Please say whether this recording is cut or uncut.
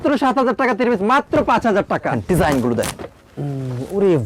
cut